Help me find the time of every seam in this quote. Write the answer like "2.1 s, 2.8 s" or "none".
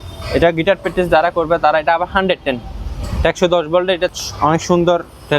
4.1 s